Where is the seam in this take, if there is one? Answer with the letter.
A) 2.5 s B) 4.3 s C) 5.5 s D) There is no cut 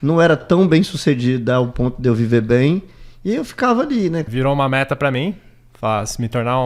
B